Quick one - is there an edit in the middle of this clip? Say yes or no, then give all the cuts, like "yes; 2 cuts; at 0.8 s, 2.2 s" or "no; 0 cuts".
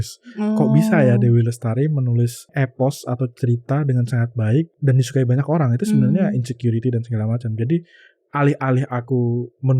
yes; 2 cuts; at 2.5 s, 4.7 s